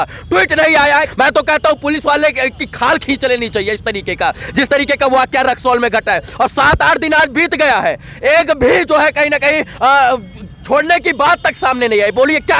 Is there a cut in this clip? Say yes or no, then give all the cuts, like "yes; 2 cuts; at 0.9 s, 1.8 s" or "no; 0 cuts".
yes; 1 cut; at 1.1 s